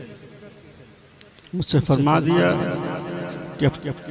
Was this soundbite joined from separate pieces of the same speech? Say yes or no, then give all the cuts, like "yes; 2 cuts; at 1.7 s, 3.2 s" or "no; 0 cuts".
no; 0 cuts